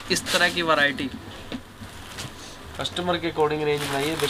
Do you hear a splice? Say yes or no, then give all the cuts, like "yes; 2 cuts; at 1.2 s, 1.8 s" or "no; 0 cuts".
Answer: yes; 1 cut; at 1.8 s